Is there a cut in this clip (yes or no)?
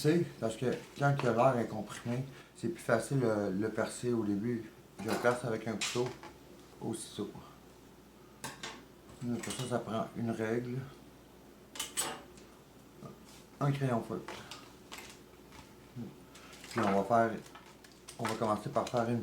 yes